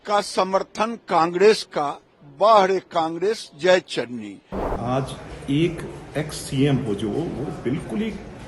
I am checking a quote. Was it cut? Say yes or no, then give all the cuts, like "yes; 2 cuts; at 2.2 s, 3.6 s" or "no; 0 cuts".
yes; 1 cut; at 4.8 s